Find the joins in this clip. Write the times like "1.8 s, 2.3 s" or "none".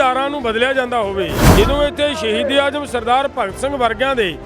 1.5 s